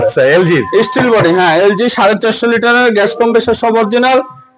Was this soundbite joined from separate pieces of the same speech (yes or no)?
no